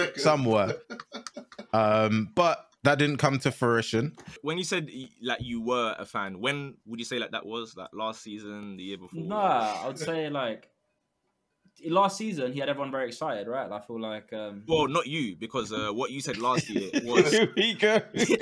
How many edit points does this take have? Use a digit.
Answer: 1